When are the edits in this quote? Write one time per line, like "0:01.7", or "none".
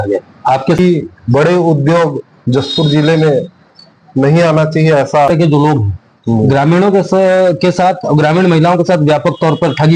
0:00.8
0:05.3